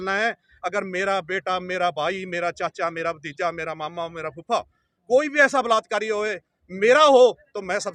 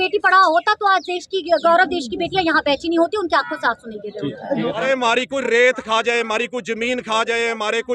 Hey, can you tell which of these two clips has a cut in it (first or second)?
second